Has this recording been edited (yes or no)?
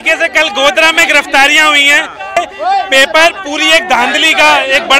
yes